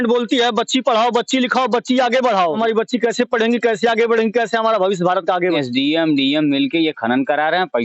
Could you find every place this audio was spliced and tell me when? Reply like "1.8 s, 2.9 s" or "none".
2.6 s, 5.6 s